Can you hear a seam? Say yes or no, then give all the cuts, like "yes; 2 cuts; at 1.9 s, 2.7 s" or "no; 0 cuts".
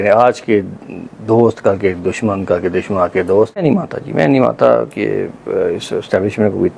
yes; 1 cut; at 3.6 s